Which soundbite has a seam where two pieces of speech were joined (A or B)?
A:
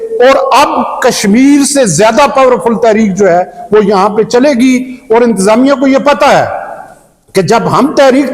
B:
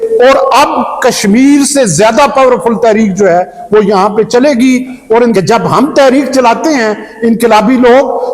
B